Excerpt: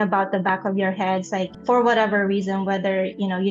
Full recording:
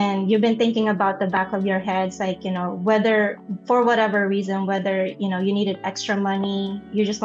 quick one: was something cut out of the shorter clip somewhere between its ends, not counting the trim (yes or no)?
yes